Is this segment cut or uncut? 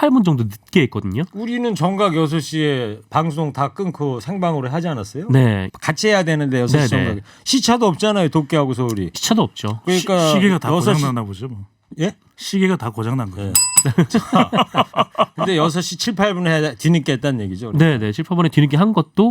cut